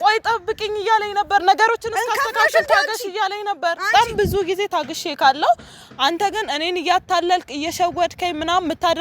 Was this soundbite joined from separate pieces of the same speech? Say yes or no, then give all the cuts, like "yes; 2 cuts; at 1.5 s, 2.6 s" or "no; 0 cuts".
yes; 1 cut; at 4.1 s